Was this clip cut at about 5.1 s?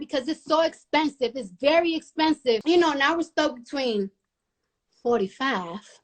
no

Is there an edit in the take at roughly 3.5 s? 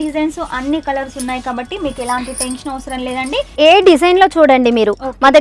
yes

